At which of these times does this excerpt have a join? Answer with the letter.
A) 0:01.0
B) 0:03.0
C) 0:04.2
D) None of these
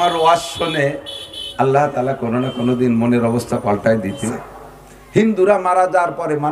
C